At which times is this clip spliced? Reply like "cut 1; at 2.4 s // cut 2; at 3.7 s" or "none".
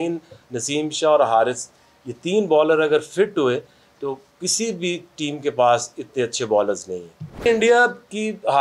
cut 1; at 7.4 s